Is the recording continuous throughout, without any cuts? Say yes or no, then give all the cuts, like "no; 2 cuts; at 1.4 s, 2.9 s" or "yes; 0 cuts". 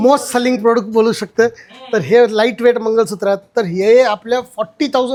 yes; 0 cuts